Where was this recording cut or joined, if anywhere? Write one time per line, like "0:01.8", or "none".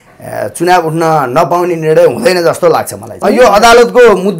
0:03.1